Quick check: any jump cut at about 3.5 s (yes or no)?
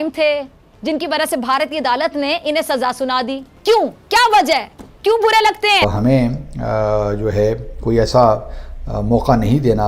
yes